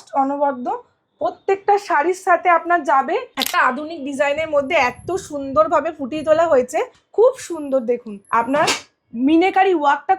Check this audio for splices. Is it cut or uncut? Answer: cut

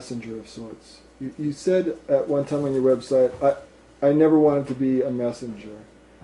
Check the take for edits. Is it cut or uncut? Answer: cut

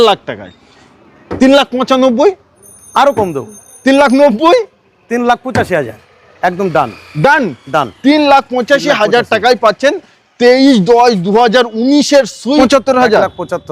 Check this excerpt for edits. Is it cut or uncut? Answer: cut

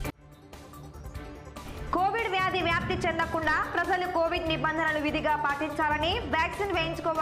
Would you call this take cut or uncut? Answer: uncut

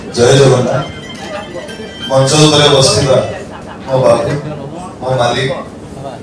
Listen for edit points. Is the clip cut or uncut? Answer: cut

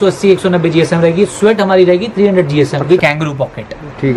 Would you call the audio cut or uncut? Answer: cut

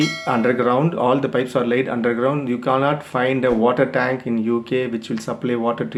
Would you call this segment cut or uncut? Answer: uncut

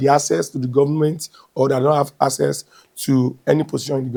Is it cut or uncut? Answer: uncut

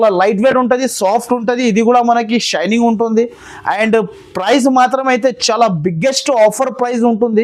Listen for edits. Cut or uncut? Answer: uncut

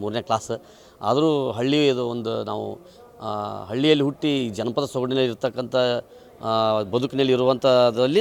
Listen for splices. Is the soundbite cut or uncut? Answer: uncut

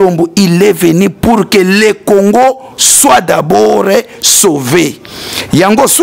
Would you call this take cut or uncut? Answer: uncut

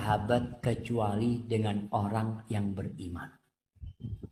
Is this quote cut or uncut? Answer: uncut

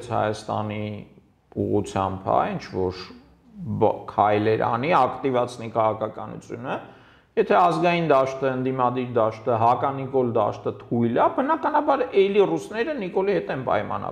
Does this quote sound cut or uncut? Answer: uncut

